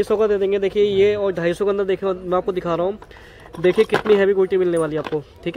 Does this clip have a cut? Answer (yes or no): no